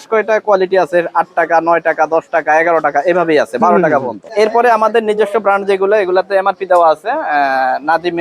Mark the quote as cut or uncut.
uncut